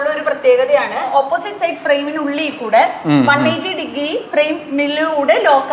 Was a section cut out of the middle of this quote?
yes; 2 cuts; at 1.1 s, 4.3 s

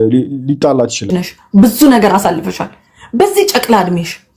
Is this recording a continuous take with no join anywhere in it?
no; 1 cut; at 1.1 s

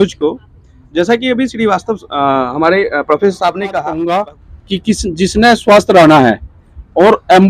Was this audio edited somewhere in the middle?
yes; 1 cut; at 3.9 s

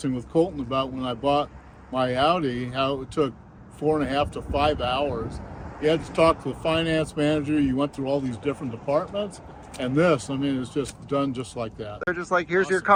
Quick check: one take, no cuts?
yes; 0 cuts

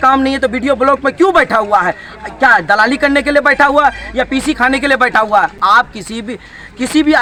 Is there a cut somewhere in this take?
no; 0 cuts

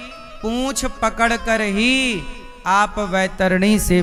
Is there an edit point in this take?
no; 0 cuts

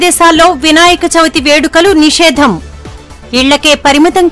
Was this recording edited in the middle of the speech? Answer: no; 0 cuts

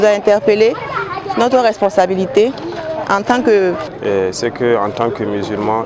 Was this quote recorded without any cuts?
no; 1 cut; at 3.8 s

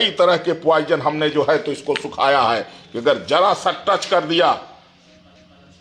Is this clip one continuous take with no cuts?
yes; 0 cuts

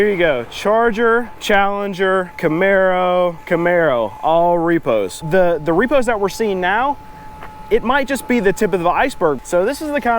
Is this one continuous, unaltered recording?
no; 5 cuts; at 1.3 s, 2.3 s, 3.4 s, 5.2 s, 9.4 s

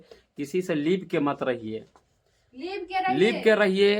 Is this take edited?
no; 0 cuts

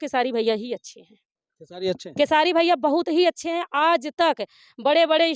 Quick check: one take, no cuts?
yes; 0 cuts

